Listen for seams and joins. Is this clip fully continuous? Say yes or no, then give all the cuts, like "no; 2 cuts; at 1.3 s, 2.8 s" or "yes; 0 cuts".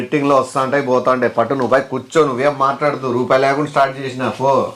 yes; 0 cuts